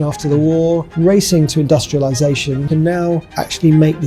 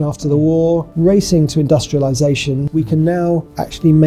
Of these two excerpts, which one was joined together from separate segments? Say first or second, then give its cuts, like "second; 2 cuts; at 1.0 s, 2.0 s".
first; 1 cut; at 2.7 s